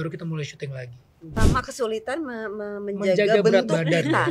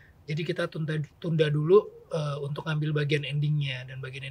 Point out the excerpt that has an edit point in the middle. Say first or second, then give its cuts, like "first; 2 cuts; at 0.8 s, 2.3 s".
first; 1 cut; at 1.4 s